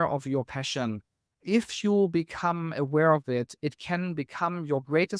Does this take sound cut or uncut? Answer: cut